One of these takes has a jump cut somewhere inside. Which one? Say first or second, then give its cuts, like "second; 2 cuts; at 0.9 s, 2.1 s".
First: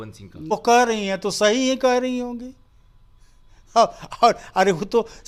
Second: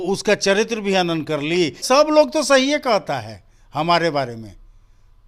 second; 1 cut; at 1.8 s